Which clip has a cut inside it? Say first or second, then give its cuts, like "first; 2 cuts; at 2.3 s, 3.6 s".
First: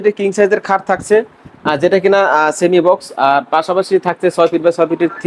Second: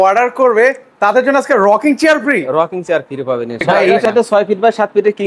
second; 1 cut; at 4.0 s